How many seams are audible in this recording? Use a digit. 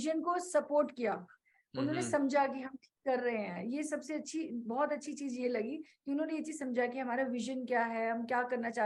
0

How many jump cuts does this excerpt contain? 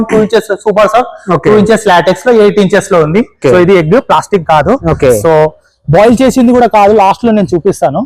1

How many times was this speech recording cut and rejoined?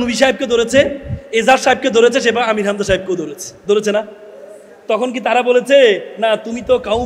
0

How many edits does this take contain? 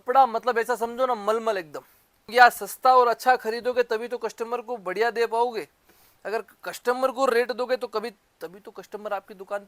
1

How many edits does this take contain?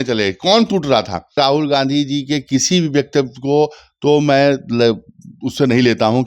1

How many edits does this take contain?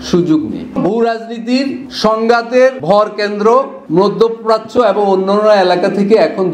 4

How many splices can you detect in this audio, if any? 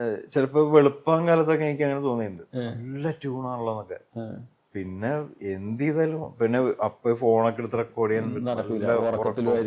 0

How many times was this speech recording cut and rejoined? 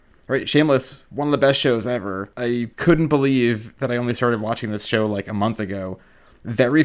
3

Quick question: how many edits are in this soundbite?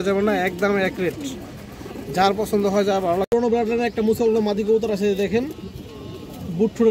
1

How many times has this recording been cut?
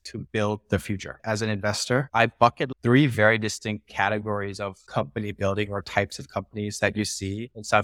2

